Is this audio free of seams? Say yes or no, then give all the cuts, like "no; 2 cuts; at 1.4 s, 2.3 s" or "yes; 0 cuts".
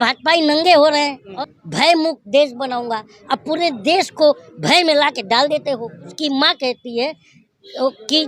no; 2 cuts; at 1.2 s, 6.1 s